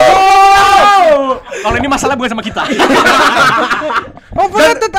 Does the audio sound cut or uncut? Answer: uncut